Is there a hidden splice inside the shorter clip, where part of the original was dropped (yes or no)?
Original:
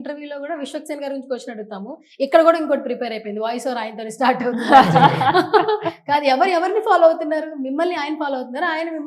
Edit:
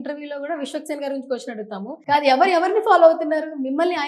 yes